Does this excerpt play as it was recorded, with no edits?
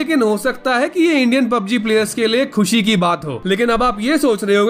no; 1 cut; at 3.3 s

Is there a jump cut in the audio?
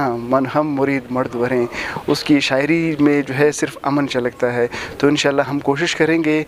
no; 0 cuts

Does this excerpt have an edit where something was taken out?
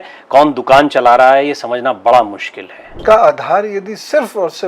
yes; 1 cut; at 2.9 s

